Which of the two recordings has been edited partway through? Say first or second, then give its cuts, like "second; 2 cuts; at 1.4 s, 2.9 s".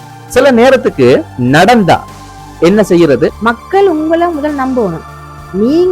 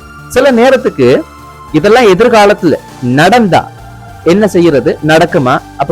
first; 2 cuts; at 1.3 s, 3.4 s